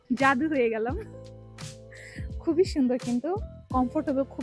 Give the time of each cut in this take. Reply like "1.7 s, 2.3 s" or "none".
none